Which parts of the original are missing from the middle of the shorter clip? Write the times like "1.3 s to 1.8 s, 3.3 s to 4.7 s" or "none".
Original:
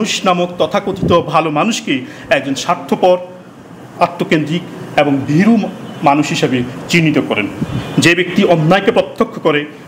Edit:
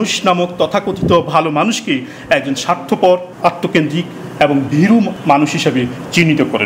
3.3 s to 3.9 s, 5.7 s to 5.9 s